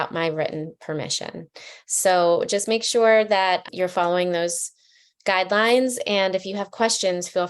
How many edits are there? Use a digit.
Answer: 1